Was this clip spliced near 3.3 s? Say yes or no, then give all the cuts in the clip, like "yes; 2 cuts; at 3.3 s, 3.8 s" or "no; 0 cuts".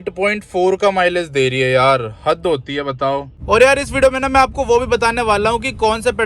yes; 1 cut; at 3.3 s